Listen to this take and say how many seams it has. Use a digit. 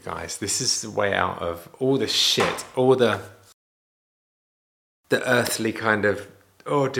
0